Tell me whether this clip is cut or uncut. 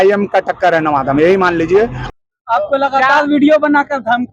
cut